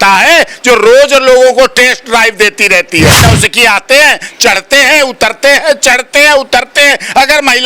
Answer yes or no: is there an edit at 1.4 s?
no